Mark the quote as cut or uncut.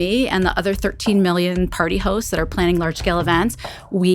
uncut